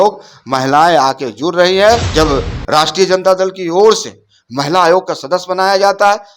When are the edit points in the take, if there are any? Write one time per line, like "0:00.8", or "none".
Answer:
0:02.1